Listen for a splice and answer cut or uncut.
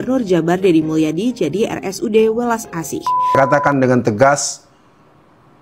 cut